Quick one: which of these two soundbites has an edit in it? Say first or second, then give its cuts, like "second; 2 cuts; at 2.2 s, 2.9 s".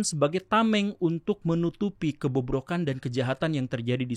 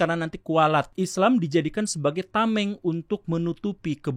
second; 1 cut; at 0.9 s